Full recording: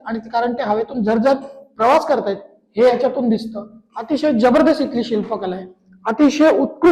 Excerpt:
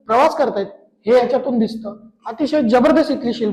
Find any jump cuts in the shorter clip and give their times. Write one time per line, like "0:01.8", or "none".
none